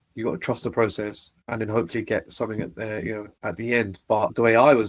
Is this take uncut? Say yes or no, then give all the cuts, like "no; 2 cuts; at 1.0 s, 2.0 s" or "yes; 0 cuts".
yes; 0 cuts